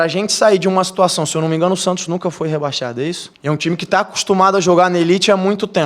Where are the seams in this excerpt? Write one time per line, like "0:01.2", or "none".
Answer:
0:03.3

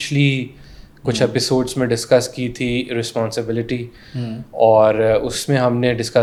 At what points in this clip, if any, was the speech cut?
none

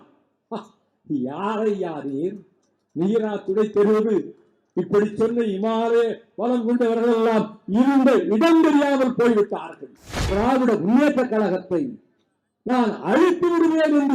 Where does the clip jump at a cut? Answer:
0:10.2

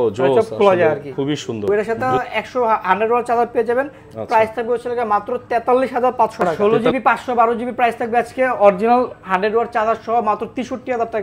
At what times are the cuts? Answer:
0:01.7
0:06.7

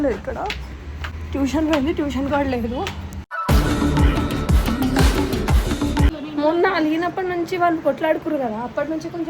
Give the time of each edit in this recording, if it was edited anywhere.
0:06.1

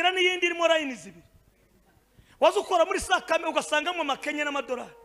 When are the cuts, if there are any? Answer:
none

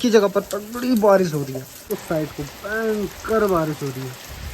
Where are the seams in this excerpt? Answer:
0:01.7

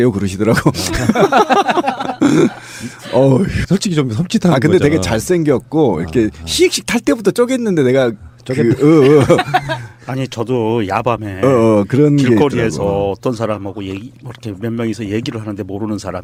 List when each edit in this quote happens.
none

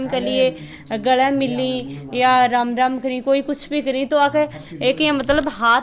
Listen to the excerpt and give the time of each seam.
none

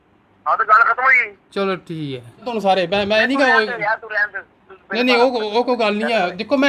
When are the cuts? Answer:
none

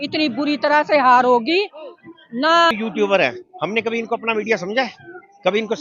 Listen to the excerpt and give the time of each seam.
0:02.7

